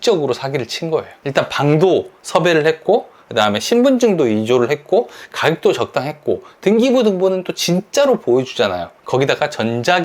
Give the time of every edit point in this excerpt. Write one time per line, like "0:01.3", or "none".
0:01.2